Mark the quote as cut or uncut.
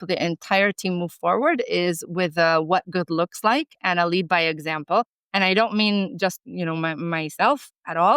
cut